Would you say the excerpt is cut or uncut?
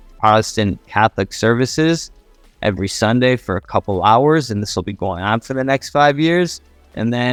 uncut